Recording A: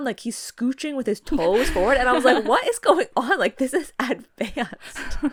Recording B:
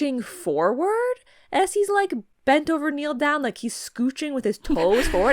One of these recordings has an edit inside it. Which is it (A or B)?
B